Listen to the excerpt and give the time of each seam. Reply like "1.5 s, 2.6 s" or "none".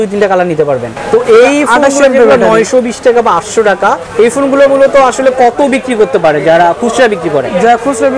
0.9 s, 4.0 s